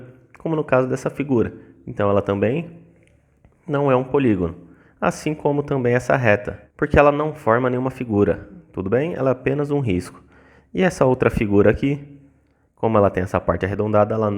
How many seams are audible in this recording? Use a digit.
1